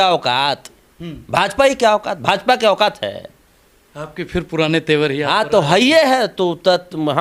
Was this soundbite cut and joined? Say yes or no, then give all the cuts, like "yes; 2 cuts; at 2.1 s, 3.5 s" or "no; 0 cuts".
no; 0 cuts